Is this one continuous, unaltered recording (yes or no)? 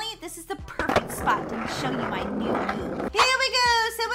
no